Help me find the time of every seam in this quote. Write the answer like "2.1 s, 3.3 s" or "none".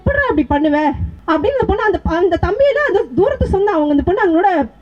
1.1 s